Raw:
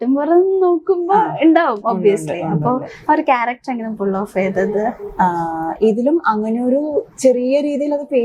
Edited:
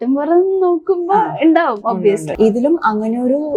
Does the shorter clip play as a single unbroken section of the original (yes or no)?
no